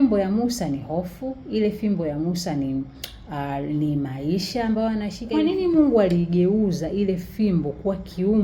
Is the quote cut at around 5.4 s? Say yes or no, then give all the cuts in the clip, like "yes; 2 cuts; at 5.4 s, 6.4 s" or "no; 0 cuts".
yes; 1 cut; at 5.4 s